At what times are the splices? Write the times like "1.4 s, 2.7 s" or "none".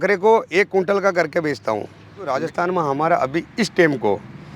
2.3 s